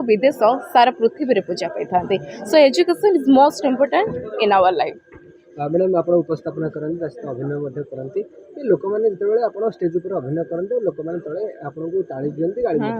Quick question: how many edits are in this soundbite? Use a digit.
0